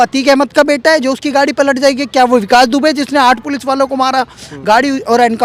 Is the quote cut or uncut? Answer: uncut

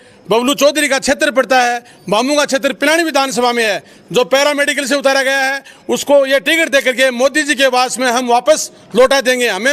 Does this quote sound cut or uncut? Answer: uncut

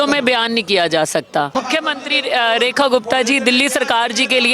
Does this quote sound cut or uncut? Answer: cut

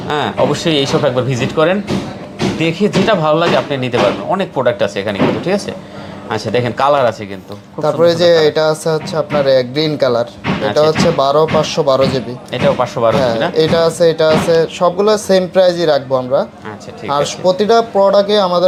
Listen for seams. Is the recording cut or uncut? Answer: uncut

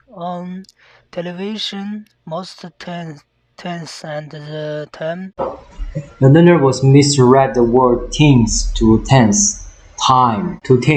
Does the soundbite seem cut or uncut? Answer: uncut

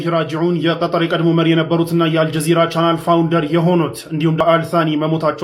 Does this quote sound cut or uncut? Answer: cut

